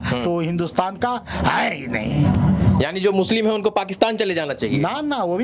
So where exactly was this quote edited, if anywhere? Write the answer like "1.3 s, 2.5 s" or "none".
none